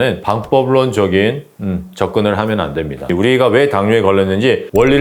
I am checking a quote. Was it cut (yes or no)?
yes